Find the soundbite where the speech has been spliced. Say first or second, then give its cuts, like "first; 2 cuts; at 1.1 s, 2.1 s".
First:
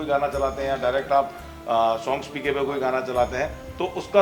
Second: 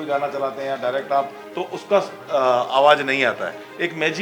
second; 1 cut; at 1.4 s